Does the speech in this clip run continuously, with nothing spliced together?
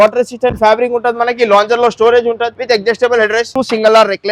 no; 2 cuts; at 2.5 s, 3.5 s

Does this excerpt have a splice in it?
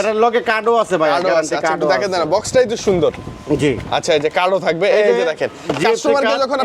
no; 0 cuts

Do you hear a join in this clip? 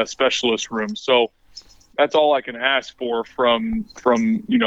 no; 0 cuts

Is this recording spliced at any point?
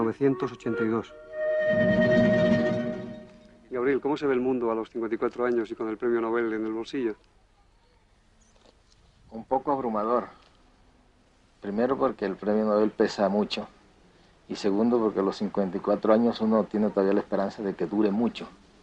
no; 0 cuts

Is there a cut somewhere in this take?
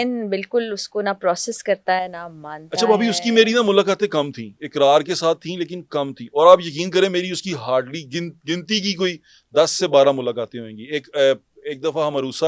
no; 0 cuts

